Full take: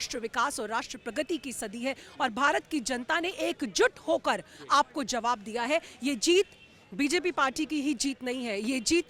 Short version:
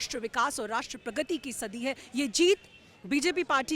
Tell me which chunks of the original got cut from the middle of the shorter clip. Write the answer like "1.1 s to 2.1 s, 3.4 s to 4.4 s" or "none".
2.0 s to 5.9 s